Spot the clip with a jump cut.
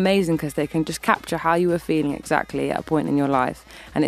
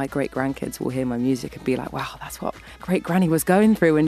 first; 1 cut; at 1.0 s

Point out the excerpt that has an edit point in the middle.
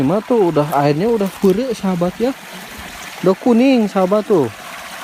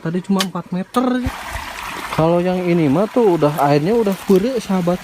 second; 1 cut; at 1.2 s

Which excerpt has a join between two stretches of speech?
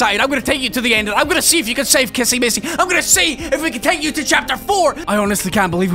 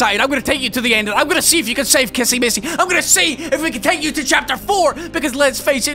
first; 1 cut; at 5.0 s

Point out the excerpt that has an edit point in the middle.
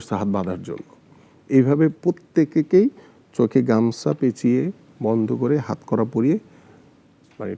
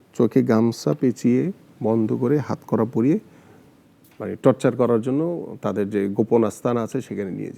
first; 1 cut; at 2.0 s

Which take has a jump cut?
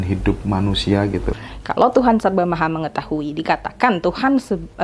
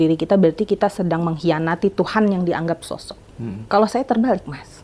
first; 1 cut; at 1.4 s

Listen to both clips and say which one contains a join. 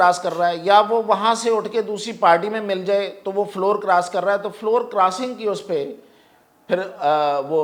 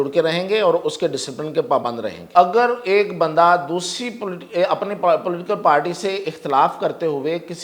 second; 1 cut; at 2.1 s

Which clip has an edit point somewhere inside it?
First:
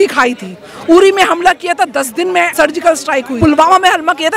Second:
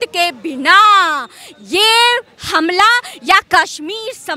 first; 2 cuts; at 2.5 s, 3.3 s

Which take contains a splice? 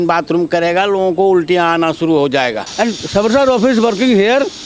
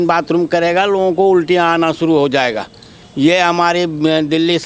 first; 1 cut; at 2.6 s

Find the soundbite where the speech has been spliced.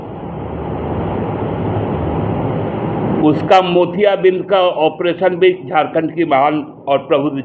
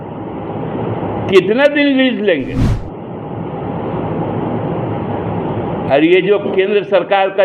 second; 1 cut; at 2.7 s

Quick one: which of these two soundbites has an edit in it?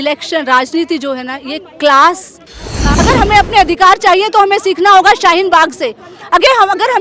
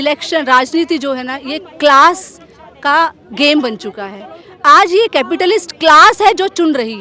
first; 1 cut; at 2.8 s

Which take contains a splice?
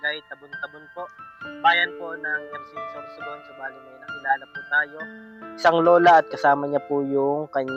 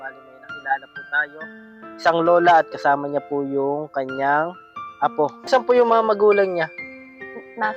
second; 1 cut; at 5.5 s

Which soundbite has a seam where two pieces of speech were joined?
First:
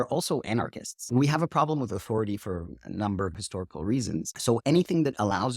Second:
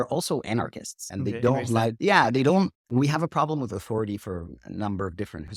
first; 2 cuts; at 1.0 s, 3.3 s

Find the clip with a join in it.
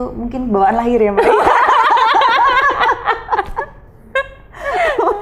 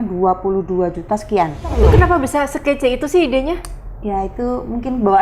second; 1 cut; at 1.8 s

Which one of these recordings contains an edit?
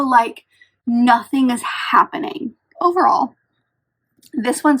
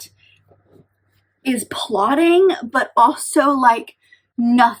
first; 1 cut; at 2.7 s

